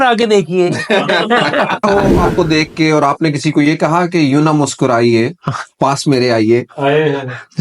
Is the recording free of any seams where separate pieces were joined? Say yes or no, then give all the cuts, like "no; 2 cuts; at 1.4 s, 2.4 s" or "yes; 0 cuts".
no; 1 cut; at 1.8 s